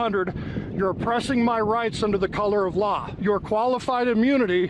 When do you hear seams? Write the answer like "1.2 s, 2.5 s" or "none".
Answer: 3.1 s